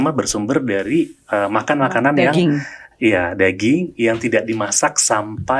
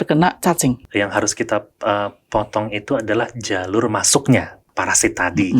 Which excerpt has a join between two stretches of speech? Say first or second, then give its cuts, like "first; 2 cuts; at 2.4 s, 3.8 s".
second; 2 cuts; at 0.8 s, 4.6 s